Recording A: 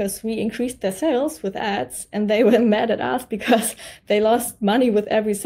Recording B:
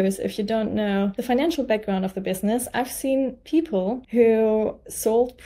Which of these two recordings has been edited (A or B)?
B